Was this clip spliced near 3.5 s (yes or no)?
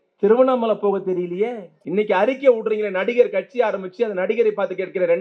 no